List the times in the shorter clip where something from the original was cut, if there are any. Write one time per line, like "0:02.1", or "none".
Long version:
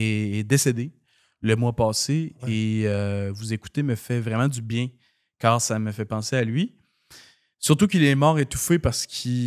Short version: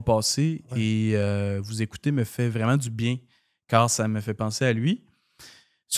none